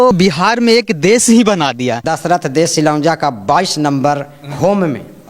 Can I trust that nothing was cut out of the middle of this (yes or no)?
no